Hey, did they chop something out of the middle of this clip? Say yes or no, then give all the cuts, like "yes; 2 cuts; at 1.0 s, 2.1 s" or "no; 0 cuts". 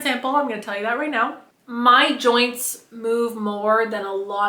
yes; 1 cut; at 1.4 s